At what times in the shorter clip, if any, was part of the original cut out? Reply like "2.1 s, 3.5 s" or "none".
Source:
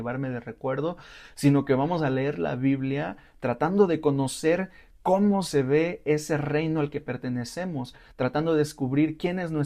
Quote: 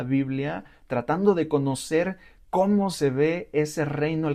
none